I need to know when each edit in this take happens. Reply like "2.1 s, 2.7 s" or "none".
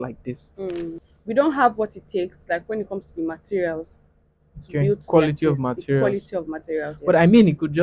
1.1 s